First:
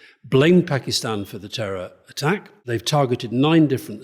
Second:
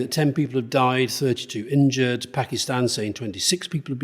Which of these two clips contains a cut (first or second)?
first